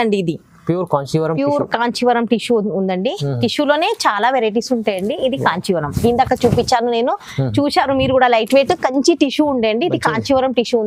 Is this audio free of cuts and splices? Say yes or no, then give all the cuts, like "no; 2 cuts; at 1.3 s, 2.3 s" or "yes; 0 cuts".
yes; 0 cuts